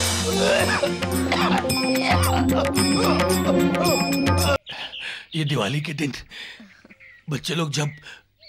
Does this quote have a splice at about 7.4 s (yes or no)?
no